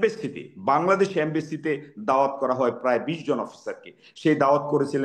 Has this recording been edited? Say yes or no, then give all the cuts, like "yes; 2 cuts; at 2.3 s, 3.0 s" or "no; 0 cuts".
no; 0 cuts